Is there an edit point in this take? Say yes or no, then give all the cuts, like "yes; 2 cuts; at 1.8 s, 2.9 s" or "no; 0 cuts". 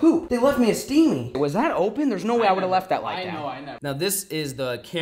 yes; 2 cuts; at 1.4 s, 3.7 s